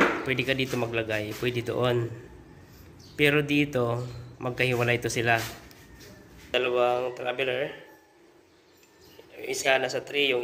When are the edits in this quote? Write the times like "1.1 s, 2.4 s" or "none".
6.5 s